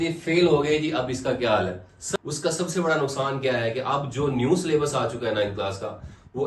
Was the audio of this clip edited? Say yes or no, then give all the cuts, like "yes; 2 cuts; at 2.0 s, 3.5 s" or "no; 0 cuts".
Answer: yes; 1 cut; at 2.0 s